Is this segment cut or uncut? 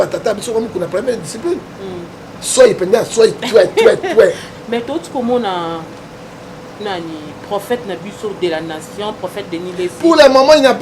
cut